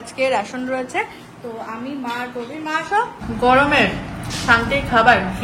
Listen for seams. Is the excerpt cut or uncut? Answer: cut